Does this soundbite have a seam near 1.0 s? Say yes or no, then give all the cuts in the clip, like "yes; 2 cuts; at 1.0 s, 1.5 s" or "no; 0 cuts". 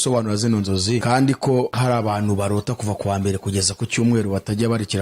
yes; 2 cuts; at 1.0 s, 1.7 s